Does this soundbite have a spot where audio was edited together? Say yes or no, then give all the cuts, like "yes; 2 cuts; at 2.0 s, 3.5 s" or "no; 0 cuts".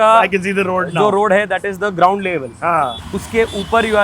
yes; 1 cut; at 3.0 s